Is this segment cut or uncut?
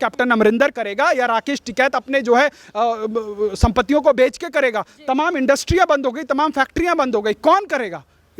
uncut